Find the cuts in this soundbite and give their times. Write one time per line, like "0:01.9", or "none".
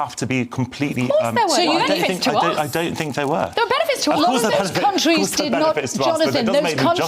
0:04.7